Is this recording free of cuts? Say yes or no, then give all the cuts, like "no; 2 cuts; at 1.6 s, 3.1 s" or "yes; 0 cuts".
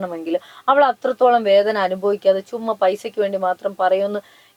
yes; 0 cuts